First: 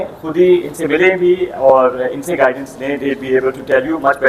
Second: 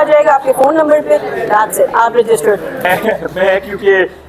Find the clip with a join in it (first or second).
second